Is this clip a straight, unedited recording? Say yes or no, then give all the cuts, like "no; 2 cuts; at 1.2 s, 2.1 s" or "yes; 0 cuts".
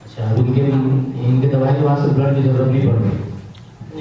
yes; 0 cuts